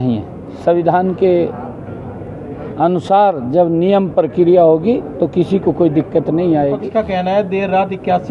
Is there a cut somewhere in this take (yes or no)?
yes